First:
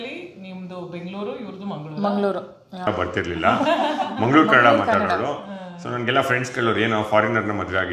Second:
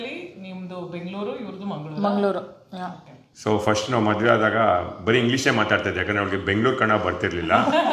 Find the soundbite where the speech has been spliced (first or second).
first